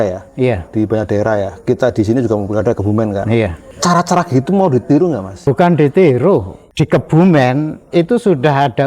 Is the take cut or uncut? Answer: cut